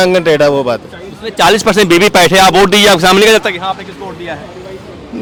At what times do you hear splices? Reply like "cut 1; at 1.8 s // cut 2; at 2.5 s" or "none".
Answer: none